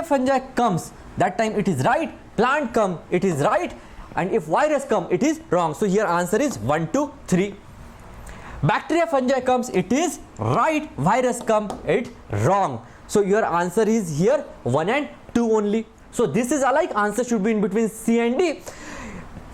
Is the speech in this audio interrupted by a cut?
yes; 1 cut; at 16.0 s

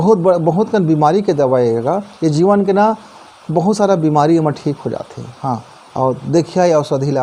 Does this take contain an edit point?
no; 0 cuts

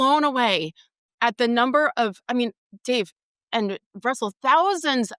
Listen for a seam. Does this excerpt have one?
no; 0 cuts

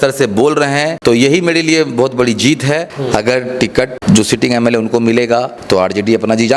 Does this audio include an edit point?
yes; 4 cuts; at 0.9 s, 2.9 s, 4.0 s, 5.6 s

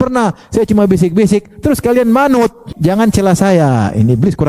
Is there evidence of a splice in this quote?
yes; 1 cut; at 2.7 s

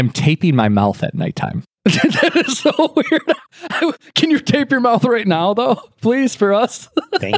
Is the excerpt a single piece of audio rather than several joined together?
yes; 0 cuts

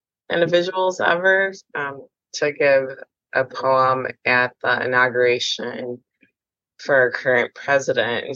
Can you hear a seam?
no; 0 cuts

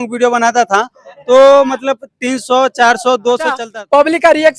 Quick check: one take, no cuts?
no; 1 cut; at 3.6 s

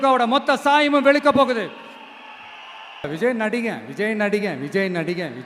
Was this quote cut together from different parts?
yes; 1 cut; at 3.1 s

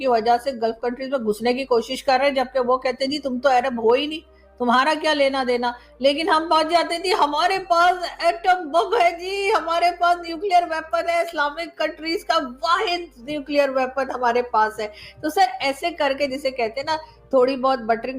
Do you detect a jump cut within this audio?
no; 0 cuts

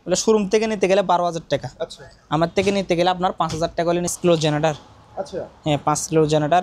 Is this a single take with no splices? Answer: no; 1 cut; at 4.1 s

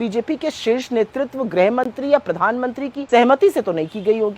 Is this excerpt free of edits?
no; 1 cut; at 2.9 s

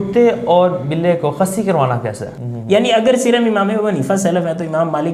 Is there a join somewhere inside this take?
yes; 1 cut; at 2.3 s

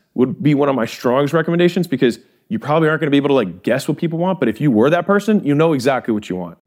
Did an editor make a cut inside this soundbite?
no; 0 cuts

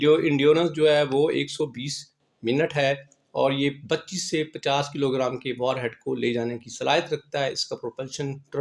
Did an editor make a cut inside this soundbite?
no; 0 cuts

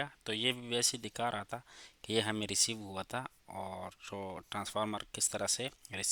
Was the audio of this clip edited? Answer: no; 0 cuts

